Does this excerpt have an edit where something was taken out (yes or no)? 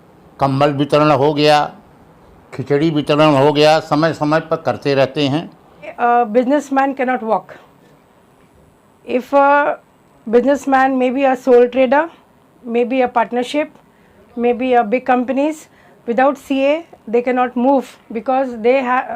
yes